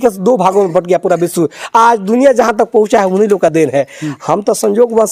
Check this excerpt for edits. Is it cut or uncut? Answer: uncut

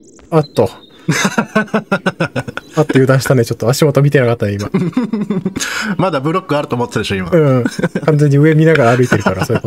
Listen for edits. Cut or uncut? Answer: uncut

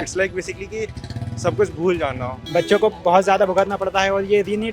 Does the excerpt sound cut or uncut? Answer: cut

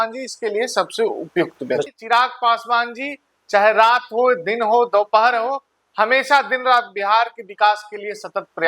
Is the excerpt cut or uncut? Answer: cut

